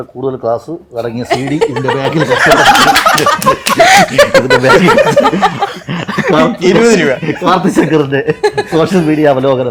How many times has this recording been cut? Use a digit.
0